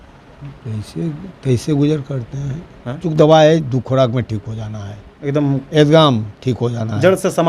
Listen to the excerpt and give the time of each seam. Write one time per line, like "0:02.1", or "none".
0:03.1